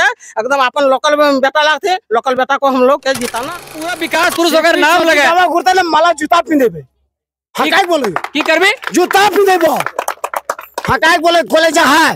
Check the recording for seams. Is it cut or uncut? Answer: cut